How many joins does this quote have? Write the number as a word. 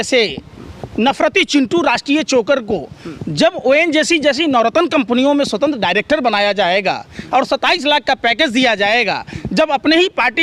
zero